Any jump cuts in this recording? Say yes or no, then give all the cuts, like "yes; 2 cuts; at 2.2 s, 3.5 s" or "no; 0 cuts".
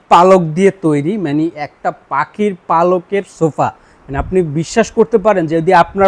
no; 0 cuts